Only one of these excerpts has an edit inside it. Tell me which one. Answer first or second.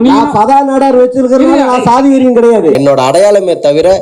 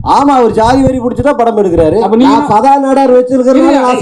first